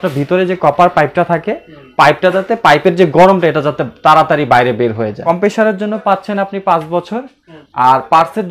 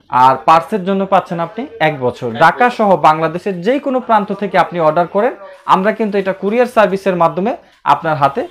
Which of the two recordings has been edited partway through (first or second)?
first